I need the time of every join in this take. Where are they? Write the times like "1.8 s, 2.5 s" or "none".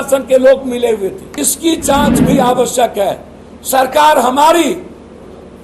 1.2 s